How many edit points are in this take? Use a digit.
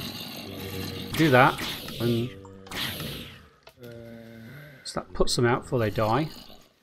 1